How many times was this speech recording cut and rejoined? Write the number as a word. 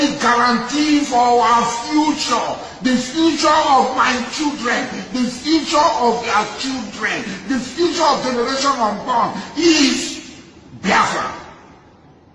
zero